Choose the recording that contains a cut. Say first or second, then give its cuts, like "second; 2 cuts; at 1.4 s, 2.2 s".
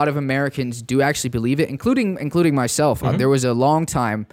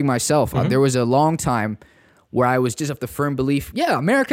second; 1 cut; at 2.8 s